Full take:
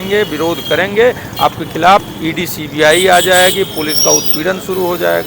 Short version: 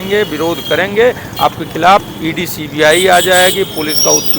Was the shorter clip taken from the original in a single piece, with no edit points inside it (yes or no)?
yes